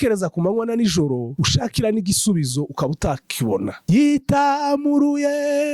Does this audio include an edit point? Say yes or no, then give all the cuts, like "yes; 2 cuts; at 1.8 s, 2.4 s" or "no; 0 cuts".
yes; 2 cuts; at 1.3 s, 3.8 s